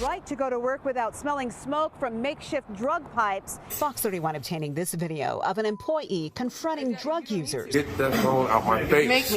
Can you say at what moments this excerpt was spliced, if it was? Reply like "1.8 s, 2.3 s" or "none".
3.7 s, 7.7 s